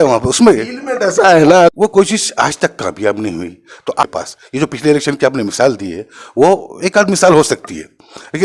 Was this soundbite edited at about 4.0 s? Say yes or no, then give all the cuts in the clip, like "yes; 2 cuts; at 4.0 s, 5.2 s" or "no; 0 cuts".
yes; 2 cuts; at 1.7 s, 4.0 s